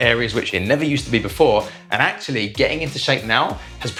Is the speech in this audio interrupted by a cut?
no; 0 cuts

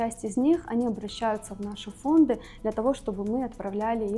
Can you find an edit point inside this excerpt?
no; 0 cuts

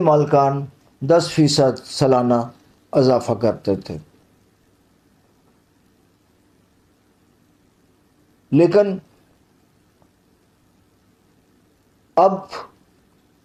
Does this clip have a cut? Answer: no; 0 cuts

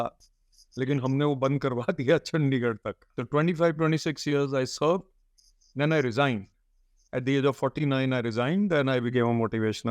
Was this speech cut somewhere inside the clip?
yes; 1 cut; at 3.1 s

